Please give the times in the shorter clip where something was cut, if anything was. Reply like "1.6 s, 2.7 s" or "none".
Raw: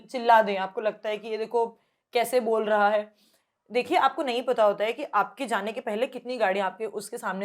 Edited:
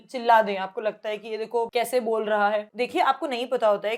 1.7 s, 2.7 s